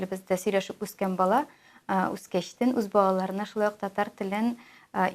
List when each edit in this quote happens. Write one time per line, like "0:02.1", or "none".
none